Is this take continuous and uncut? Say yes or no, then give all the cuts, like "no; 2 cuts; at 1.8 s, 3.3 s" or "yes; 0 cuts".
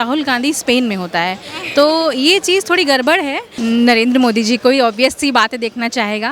no; 1 cut; at 3.4 s